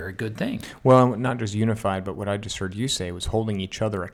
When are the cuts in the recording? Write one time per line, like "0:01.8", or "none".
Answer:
none